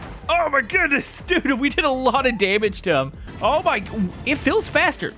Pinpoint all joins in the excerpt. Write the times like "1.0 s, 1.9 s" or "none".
3.2 s